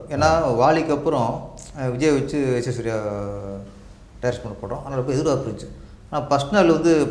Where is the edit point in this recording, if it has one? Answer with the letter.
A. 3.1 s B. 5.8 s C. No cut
C